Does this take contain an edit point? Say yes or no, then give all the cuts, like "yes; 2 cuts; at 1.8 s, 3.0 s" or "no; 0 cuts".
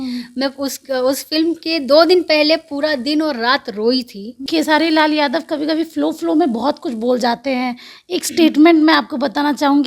yes; 1 cut; at 4.4 s